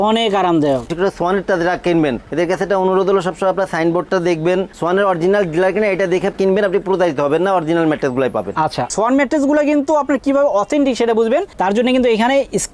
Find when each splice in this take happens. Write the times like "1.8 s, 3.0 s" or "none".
0.9 s, 8.9 s